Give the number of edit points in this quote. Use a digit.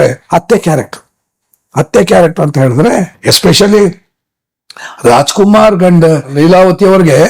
1